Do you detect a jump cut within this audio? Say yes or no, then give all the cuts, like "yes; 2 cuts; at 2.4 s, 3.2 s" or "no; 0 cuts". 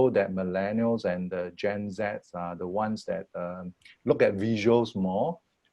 no; 0 cuts